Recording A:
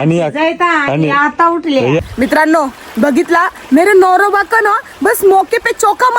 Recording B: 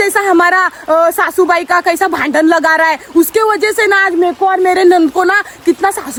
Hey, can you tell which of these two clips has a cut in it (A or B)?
A